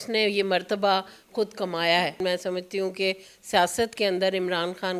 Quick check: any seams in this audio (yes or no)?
yes